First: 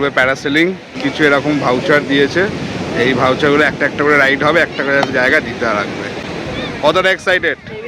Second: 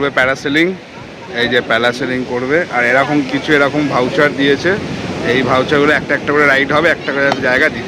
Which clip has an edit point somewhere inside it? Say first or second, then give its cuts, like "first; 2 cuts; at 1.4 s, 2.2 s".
first; 1 cut; at 1.0 s